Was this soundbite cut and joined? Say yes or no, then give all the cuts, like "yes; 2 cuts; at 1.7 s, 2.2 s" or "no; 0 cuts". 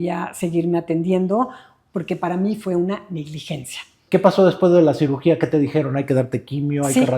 yes; 1 cut; at 4.0 s